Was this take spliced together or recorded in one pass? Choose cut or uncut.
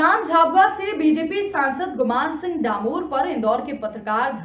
cut